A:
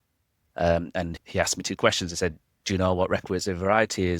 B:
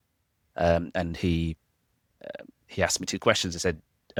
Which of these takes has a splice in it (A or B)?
A